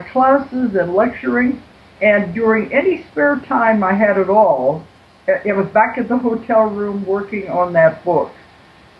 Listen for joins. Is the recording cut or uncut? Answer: cut